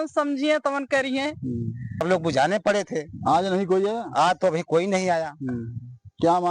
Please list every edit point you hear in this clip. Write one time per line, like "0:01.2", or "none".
0:02.0